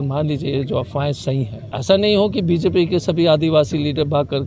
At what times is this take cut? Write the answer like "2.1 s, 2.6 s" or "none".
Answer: 1.6 s

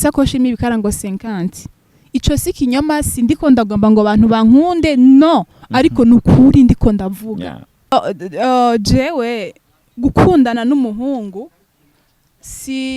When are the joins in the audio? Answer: 7.9 s

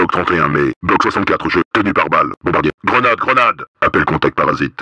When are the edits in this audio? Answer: 1.7 s, 3.7 s

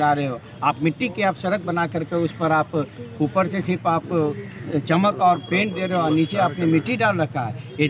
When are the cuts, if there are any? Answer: none

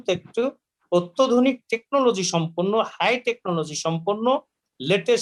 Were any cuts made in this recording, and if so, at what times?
none

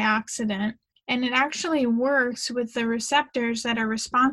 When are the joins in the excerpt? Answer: 0.9 s

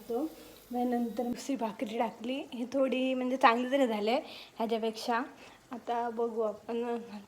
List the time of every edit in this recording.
1.3 s

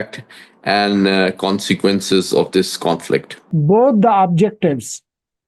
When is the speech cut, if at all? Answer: 3.5 s

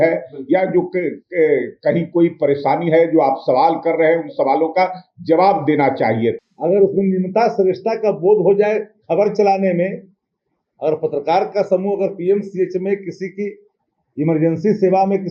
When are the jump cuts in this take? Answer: 6.4 s

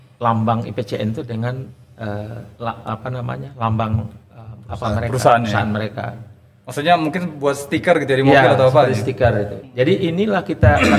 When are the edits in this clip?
2.4 s

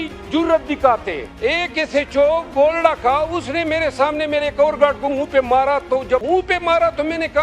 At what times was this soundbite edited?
1.2 s, 6.2 s

